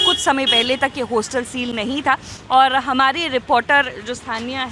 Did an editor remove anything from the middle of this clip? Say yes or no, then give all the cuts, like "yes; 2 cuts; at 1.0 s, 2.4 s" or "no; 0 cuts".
no; 0 cuts